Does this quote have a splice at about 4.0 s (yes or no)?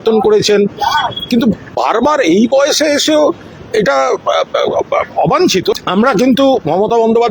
no